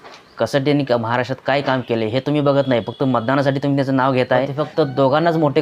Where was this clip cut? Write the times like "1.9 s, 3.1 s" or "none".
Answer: 4.6 s